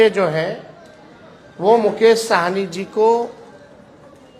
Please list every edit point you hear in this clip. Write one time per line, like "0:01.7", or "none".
none